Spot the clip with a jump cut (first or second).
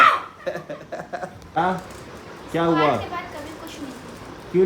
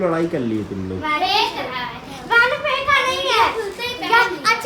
first